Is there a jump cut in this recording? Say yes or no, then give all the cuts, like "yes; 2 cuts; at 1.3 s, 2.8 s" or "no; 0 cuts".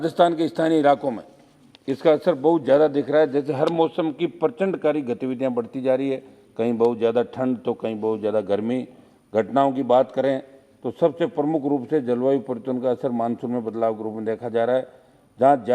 no; 0 cuts